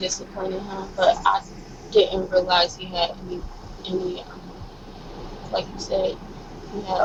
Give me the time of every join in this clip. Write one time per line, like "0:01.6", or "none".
none